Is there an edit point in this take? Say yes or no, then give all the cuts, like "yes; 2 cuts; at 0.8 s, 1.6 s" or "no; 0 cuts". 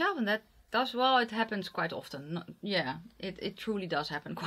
no; 0 cuts